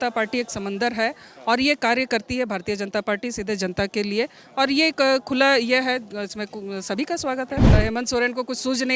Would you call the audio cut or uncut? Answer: cut